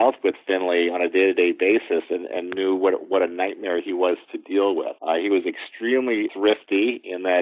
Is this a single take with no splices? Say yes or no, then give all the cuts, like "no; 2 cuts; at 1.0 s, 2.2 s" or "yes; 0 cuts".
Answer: no; 2 cuts; at 4.9 s, 6.3 s